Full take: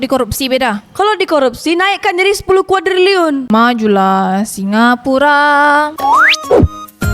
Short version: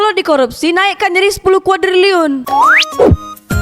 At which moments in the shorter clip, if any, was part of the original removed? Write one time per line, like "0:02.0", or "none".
0:02.4